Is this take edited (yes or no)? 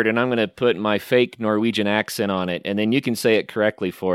no